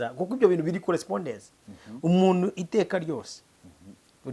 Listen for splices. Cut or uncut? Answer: uncut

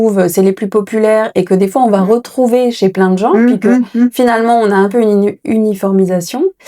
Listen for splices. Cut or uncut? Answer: uncut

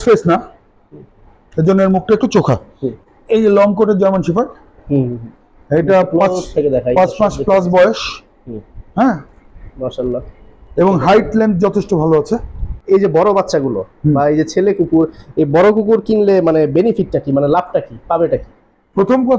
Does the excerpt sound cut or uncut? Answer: cut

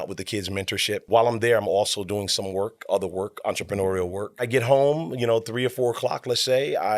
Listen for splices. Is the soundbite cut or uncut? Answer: cut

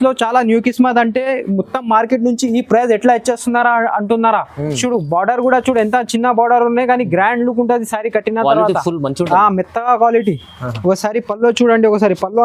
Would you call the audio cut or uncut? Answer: cut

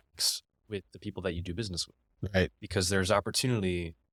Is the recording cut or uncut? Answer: uncut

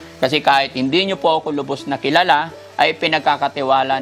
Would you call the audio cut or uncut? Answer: uncut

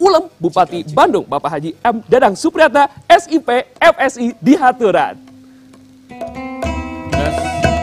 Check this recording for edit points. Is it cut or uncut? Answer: uncut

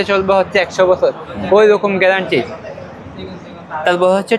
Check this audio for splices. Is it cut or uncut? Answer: uncut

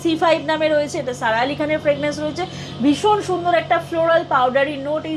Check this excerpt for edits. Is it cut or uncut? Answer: uncut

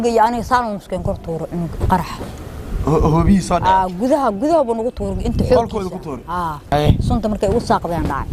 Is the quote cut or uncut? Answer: cut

